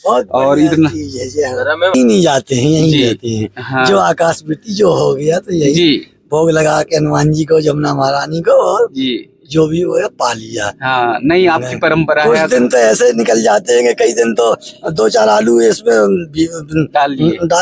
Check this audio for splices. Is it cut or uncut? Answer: cut